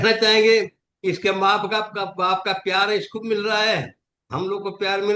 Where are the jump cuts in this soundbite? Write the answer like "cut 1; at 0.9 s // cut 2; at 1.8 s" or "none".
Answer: none